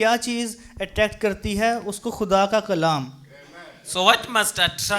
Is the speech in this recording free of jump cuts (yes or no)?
yes